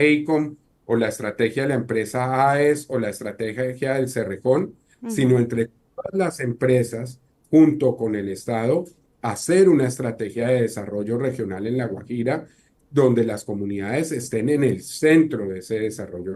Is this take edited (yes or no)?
no